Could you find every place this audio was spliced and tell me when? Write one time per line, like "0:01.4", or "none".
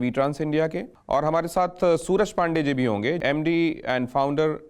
0:00.9
0:03.2